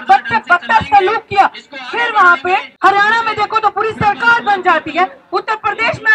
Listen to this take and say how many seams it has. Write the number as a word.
one